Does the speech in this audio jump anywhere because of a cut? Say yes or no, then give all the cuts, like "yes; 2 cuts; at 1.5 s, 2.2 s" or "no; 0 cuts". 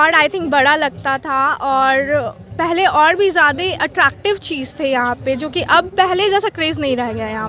no; 0 cuts